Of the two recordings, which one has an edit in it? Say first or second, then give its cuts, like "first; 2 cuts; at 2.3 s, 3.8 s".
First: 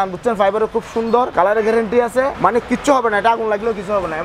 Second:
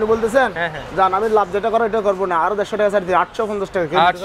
first; 2 cuts; at 1.3 s, 2.3 s